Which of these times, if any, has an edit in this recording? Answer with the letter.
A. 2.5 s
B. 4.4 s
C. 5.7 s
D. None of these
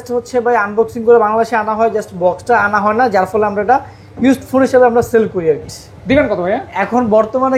C